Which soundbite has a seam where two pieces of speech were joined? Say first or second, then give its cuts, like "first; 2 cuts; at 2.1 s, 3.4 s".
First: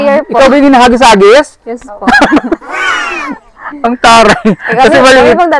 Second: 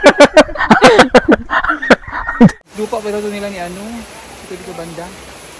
second; 1 cut; at 2.5 s